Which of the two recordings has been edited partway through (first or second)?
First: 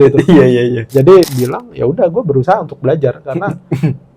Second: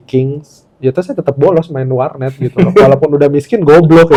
first